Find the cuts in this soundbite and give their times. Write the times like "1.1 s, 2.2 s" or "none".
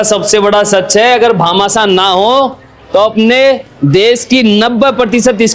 none